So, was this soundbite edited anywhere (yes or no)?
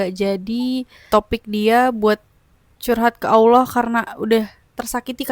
yes